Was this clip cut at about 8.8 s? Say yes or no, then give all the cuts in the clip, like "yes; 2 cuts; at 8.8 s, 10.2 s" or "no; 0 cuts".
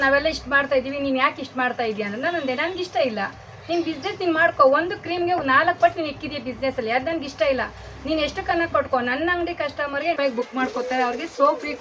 no; 1 cut; at 10.2 s